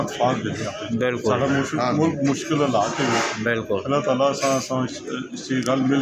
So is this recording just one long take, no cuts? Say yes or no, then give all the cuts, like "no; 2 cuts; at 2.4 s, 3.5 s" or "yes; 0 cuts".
yes; 0 cuts